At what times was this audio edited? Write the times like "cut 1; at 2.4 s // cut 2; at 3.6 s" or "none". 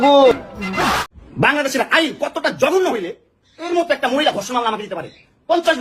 cut 1; at 1.0 s